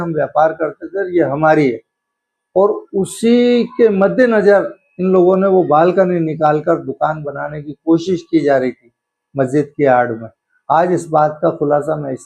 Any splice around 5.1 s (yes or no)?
no